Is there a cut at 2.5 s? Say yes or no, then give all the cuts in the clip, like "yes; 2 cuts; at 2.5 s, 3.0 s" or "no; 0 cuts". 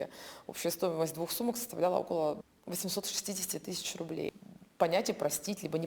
yes; 2 cuts; at 2.5 s, 4.4 s